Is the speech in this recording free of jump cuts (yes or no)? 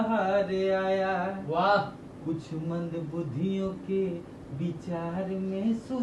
yes